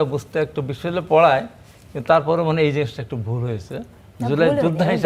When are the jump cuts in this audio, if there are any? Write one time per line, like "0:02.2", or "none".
none